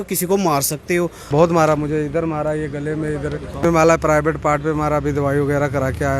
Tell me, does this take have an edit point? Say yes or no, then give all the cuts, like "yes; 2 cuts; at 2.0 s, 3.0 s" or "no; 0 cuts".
yes; 2 cuts; at 1.2 s, 3.6 s